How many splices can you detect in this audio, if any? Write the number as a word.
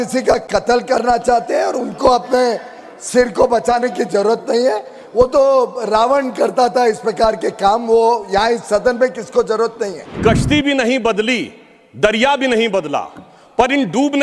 one